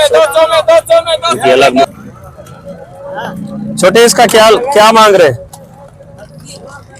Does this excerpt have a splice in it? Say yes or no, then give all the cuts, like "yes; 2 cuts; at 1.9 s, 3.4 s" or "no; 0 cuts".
yes; 1 cut; at 1.8 s